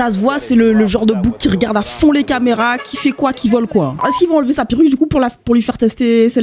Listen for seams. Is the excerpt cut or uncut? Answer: cut